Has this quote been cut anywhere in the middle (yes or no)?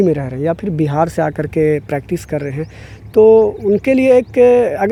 no